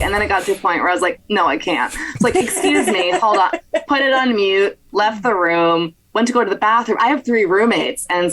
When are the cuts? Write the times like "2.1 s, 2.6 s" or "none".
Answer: 7.0 s